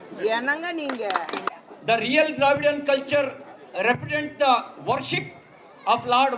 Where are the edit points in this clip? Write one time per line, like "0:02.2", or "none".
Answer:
0:01.5